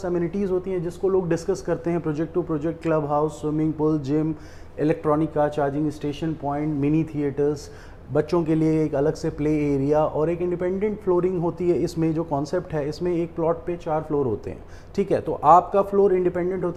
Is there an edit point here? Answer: no; 0 cuts

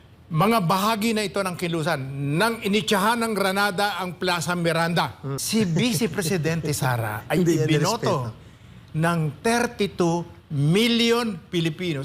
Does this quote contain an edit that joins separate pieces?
yes; 1 cut; at 5.4 s

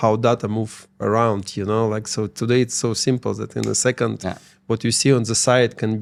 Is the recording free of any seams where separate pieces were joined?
yes; 0 cuts

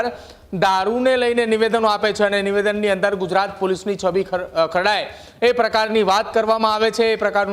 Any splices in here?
no; 0 cuts

